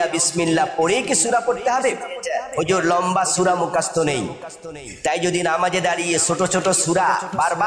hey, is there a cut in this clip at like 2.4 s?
yes; 1 cut; at 2.4 s

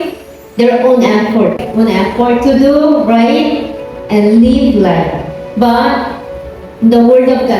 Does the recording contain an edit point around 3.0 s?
no; 1 cut; at 1.6 s

